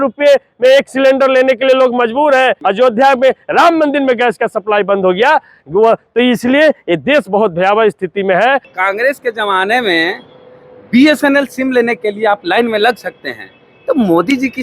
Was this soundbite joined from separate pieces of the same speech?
yes; 2 cuts; at 2.6 s, 8.7 s

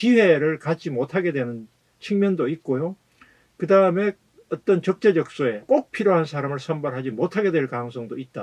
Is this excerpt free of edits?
no; 1 cut; at 5.6 s

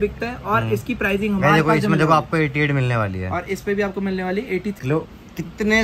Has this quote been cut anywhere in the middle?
yes; 1 cut; at 4.8 s

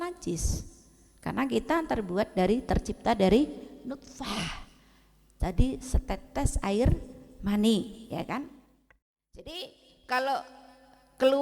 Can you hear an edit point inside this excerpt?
yes; 1 cut; at 9.4 s

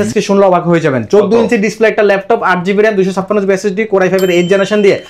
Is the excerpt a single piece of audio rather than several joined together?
yes; 0 cuts

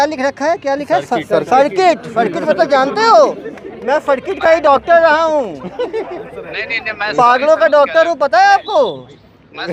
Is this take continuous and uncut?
yes; 0 cuts

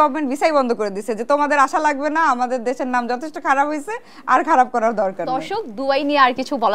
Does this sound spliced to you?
no; 0 cuts

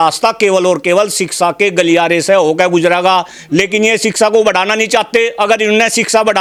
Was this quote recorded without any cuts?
yes; 0 cuts

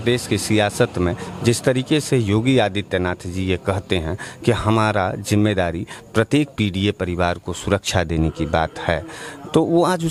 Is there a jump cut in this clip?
no; 0 cuts

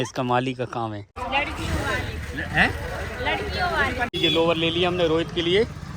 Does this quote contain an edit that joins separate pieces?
yes; 2 cuts; at 1.1 s, 4.1 s

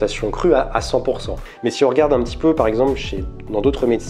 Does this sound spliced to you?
yes; 1 cut; at 1.4 s

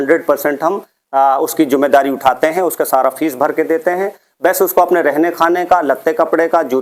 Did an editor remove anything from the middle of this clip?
no; 0 cuts

